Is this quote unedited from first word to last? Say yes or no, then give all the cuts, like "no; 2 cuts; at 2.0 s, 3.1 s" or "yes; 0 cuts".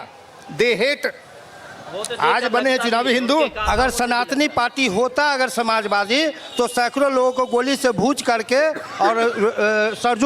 no; 1 cut; at 3.6 s